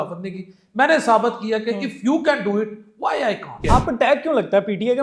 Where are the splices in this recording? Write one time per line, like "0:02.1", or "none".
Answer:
0:03.6